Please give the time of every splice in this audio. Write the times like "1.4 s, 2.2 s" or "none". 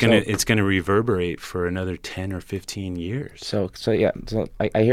none